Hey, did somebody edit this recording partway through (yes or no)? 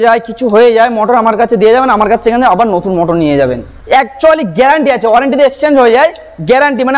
no